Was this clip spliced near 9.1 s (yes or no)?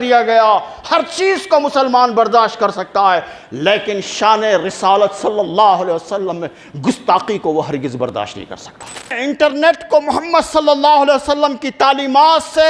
yes